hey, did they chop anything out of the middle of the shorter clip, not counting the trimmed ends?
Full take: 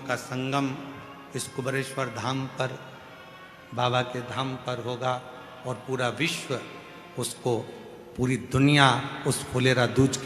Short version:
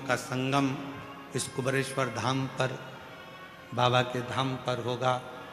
no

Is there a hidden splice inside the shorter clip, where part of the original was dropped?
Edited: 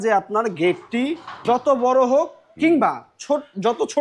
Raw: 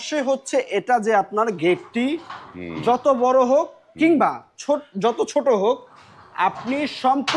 yes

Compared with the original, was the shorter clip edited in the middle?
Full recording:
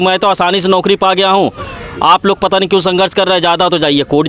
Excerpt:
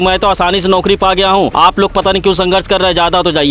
yes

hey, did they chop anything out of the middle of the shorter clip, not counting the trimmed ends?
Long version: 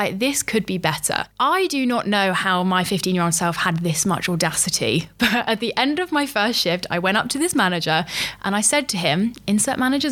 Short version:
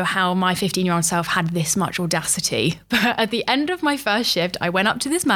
no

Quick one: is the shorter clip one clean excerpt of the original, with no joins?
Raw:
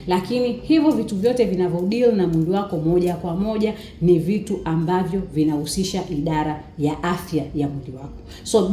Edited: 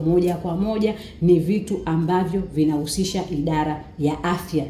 yes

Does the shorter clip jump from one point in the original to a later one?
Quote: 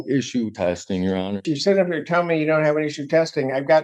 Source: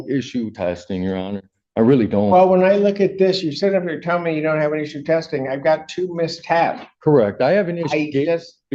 yes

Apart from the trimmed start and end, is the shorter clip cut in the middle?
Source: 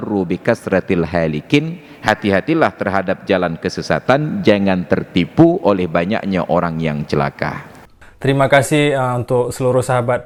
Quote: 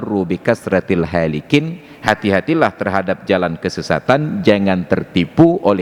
no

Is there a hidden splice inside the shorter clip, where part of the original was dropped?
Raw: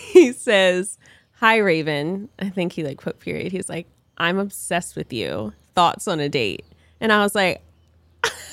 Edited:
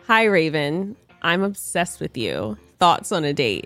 yes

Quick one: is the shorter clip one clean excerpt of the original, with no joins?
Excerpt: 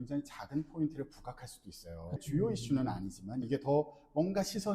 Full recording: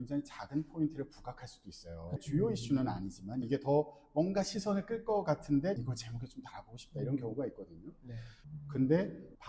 yes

